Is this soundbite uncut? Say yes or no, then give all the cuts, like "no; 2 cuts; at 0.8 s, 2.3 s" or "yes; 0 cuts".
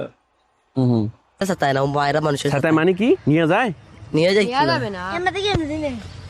no; 1 cut; at 1.4 s